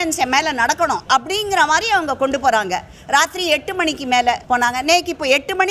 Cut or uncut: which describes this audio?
cut